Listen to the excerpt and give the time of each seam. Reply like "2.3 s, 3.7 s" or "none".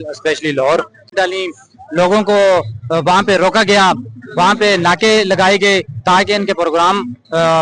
1.1 s